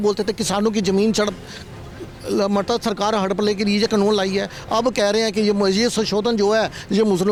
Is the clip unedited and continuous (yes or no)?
yes